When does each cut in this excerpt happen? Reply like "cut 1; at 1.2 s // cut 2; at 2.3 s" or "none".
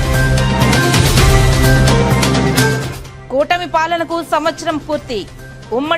cut 1; at 1.8 s